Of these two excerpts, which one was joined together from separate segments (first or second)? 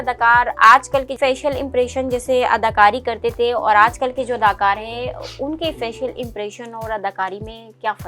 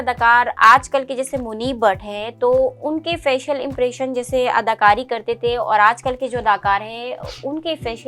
first